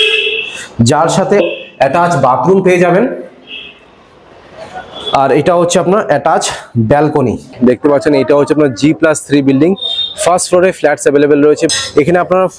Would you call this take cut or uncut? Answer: cut